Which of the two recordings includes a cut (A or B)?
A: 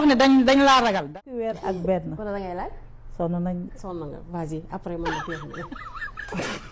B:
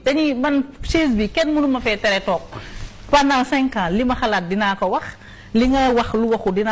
A